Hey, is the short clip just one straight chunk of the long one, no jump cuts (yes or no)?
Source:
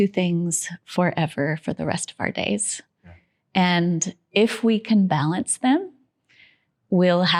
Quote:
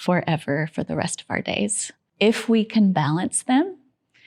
no